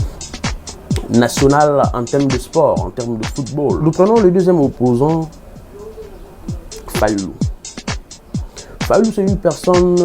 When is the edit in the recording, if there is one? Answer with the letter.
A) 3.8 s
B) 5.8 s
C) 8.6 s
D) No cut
A